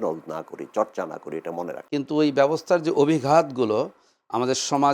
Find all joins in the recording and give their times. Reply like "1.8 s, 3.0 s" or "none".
1.8 s